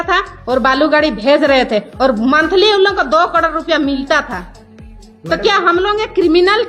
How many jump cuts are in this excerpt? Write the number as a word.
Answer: zero